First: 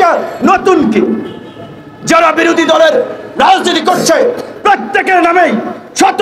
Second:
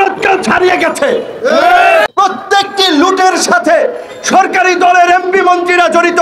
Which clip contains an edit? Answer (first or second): second